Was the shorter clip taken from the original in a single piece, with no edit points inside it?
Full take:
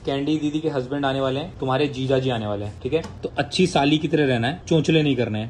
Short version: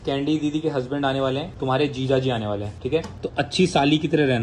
yes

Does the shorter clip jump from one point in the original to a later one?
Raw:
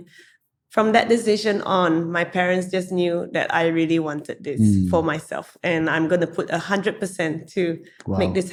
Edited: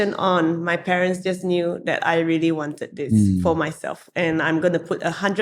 no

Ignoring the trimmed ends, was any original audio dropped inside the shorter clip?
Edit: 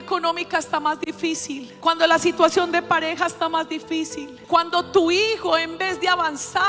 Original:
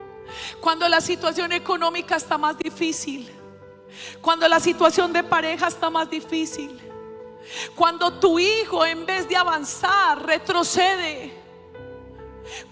yes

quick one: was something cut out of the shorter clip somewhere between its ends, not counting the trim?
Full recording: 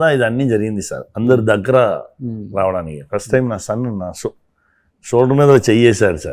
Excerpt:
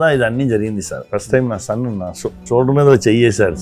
yes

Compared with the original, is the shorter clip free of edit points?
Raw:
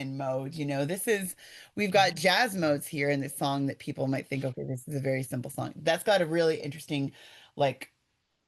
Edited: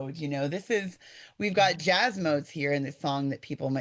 yes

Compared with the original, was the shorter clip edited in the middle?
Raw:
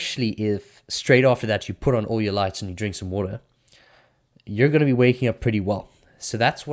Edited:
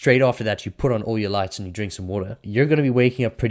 yes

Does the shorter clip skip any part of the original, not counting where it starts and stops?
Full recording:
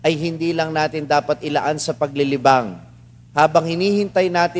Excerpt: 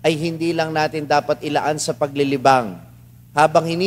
no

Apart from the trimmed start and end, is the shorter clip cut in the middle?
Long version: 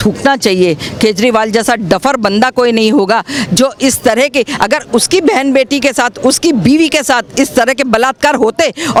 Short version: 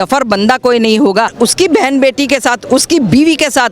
yes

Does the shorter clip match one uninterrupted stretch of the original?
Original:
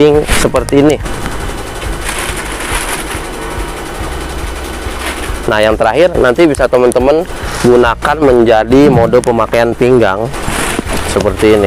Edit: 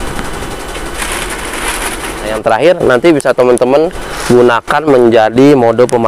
no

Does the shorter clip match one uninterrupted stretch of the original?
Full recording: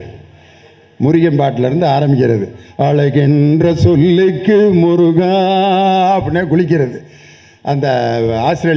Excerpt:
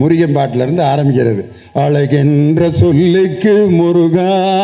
yes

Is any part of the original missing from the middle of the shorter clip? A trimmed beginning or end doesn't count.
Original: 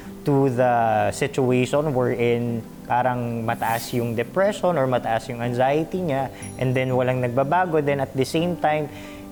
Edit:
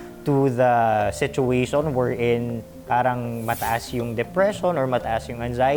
no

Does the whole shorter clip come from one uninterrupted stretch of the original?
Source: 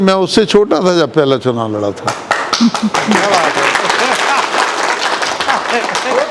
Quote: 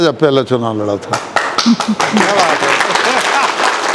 yes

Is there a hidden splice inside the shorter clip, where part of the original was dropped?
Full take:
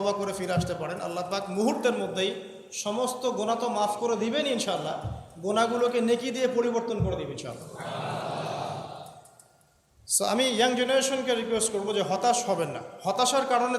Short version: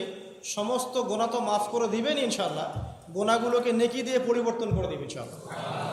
no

